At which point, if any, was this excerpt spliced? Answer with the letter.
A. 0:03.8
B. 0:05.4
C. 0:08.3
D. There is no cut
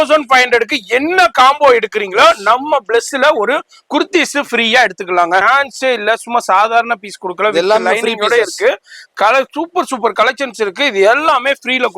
B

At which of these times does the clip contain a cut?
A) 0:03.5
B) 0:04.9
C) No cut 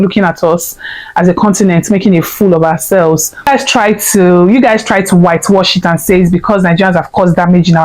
A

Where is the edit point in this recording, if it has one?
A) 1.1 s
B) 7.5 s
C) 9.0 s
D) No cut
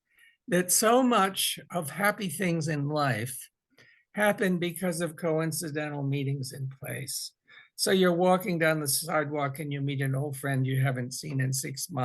D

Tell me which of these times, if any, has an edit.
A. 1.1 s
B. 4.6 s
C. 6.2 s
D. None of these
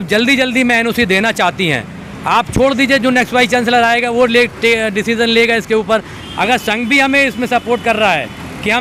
C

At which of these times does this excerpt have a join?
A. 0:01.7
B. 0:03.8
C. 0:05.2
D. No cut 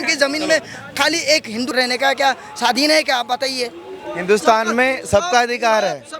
A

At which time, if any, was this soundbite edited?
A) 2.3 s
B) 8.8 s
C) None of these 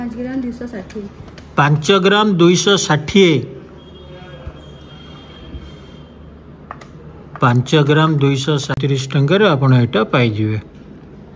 B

